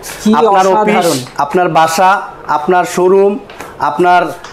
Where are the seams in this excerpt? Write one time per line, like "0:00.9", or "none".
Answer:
none